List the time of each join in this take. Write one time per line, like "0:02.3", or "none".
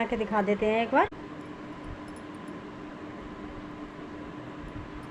0:01.1